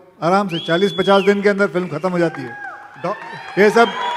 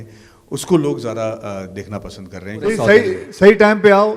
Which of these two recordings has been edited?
second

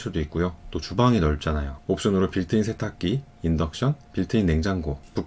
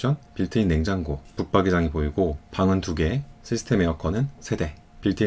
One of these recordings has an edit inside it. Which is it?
second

